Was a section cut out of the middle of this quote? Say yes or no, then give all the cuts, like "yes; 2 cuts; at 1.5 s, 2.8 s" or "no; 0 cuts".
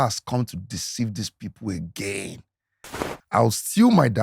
yes; 1 cut; at 2.9 s